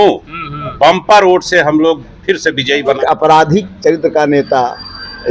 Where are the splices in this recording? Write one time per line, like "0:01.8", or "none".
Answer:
0:03.0